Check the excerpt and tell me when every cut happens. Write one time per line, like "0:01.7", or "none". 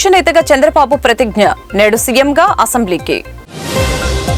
none